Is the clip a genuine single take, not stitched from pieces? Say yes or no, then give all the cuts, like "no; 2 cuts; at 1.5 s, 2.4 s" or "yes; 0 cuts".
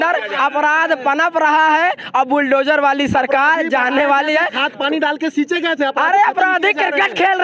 yes; 0 cuts